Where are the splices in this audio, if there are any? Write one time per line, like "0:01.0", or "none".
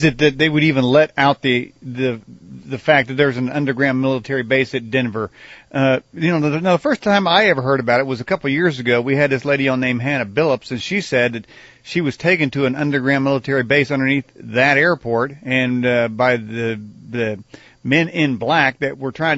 none